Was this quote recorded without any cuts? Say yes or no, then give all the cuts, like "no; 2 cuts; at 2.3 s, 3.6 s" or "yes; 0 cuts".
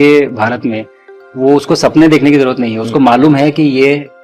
yes; 0 cuts